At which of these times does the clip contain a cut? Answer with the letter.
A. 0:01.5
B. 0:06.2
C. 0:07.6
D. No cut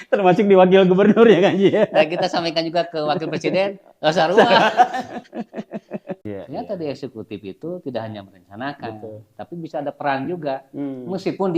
B